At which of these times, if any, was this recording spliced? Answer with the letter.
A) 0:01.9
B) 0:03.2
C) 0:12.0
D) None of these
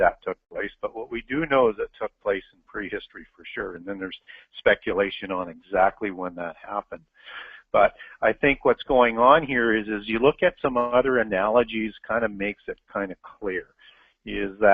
C